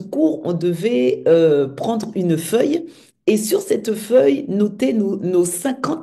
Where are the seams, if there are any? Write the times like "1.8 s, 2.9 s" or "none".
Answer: none